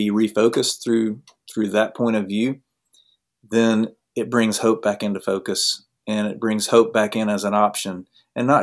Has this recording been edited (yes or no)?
no